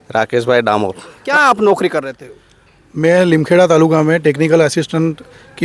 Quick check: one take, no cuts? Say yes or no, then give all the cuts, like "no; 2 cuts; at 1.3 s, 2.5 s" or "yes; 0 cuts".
no; 1 cut; at 1.2 s